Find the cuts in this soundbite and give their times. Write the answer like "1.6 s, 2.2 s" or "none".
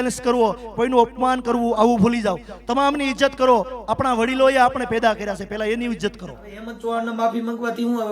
6.7 s